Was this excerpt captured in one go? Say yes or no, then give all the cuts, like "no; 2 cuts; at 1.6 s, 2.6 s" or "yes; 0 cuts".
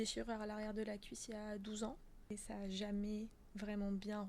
no; 1 cut; at 2.3 s